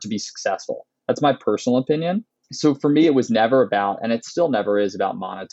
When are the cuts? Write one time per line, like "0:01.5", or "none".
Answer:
none